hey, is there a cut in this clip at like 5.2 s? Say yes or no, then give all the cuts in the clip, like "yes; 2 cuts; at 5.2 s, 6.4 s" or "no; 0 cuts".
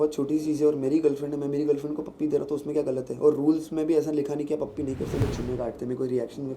yes; 1 cut; at 5.2 s